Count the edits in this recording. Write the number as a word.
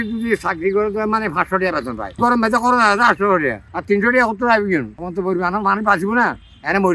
two